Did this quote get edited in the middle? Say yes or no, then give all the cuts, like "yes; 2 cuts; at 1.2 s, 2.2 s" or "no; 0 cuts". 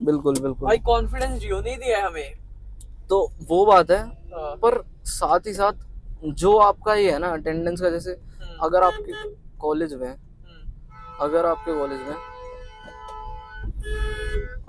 no; 0 cuts